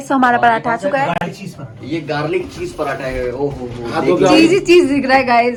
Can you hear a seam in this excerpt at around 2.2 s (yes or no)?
no